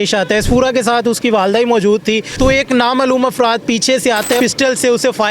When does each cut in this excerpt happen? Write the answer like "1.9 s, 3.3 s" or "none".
2.3 s, 4.4 s